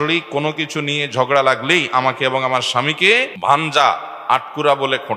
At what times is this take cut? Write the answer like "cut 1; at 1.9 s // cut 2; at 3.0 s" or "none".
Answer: cut 1; at 3.3 s

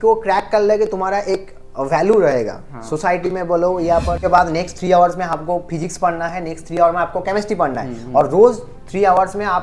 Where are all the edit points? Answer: cut 1; at 4.2 s

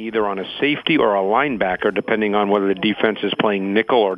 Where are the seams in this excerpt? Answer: none

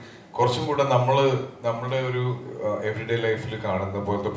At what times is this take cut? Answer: none

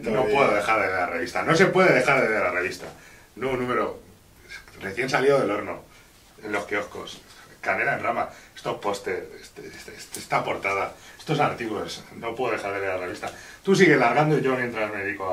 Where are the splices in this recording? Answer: none

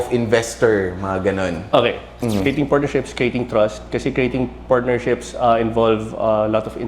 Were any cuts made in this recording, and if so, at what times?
cut 1; at 2.1 s

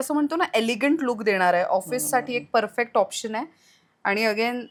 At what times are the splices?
none

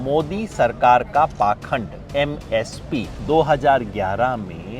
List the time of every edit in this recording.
cut 1; at 3.1 s

